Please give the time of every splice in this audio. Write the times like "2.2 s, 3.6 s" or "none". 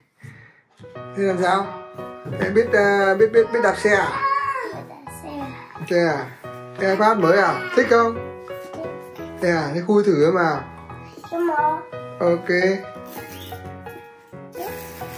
12.8 s